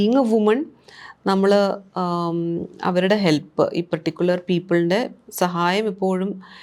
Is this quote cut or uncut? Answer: uncut